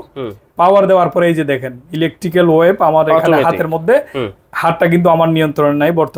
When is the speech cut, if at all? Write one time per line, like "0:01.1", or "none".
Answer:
none